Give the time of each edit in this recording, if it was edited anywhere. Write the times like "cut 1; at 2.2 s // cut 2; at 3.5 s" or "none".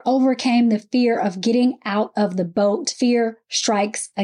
cut 1; at 2.9 s